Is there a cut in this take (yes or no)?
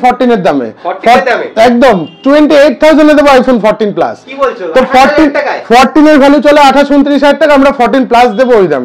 no